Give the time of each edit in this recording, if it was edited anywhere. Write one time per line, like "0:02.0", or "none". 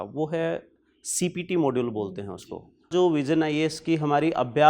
0:02.9